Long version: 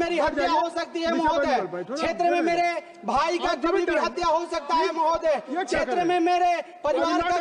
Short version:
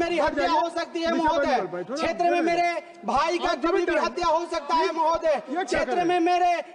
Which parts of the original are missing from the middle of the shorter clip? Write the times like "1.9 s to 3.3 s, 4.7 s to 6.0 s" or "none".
none